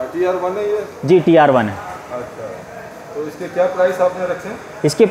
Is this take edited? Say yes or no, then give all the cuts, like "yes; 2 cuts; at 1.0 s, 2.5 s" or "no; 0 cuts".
no; 0 cuts